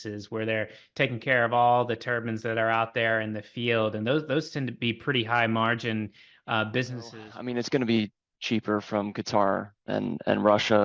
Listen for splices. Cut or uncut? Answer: cut